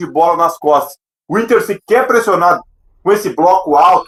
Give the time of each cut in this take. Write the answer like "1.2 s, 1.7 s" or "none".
none